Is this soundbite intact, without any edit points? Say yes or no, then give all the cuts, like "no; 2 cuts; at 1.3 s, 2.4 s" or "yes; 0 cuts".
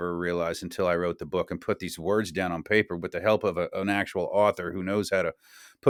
yes; 0 cuts